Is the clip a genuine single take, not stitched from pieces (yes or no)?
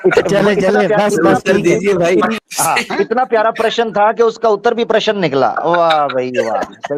no